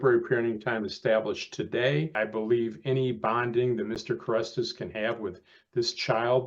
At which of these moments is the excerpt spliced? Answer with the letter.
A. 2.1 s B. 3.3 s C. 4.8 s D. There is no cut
A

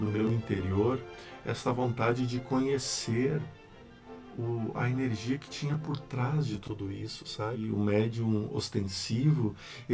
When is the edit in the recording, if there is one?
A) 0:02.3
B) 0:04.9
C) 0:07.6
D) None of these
C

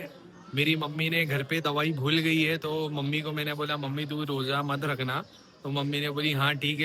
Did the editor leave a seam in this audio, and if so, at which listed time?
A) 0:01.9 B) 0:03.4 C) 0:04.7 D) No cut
D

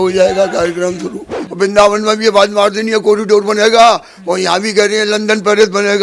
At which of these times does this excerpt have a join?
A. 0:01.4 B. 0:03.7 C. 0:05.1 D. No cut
A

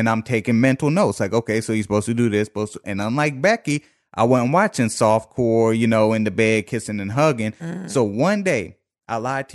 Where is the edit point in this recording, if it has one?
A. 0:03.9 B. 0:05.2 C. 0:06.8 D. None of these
D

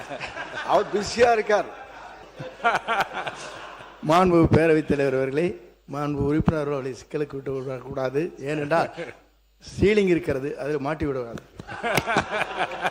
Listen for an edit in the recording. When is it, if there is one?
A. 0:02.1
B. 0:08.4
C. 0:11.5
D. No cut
A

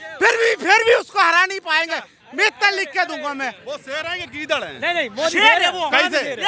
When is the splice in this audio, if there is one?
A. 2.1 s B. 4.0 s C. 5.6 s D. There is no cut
D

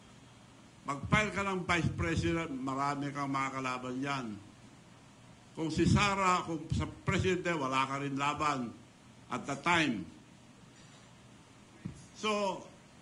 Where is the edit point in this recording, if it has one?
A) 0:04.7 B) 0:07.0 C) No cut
C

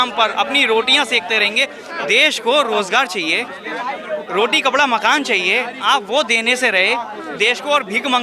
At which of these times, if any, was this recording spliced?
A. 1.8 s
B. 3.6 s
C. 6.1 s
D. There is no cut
A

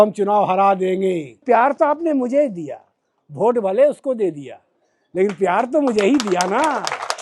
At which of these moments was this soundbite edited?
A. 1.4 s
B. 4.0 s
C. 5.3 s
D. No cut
A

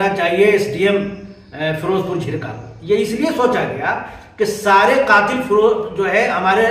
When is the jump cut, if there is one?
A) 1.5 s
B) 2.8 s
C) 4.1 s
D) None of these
D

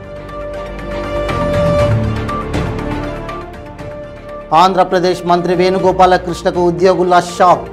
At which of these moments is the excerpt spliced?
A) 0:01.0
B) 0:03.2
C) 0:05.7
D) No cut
D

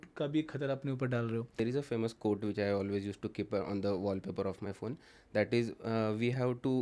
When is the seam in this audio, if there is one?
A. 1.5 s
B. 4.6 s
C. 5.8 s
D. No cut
A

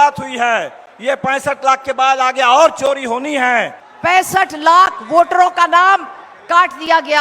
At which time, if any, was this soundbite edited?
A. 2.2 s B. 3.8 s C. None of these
B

